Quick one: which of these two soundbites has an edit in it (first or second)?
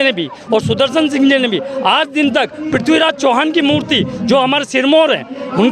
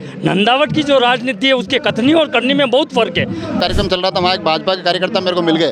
second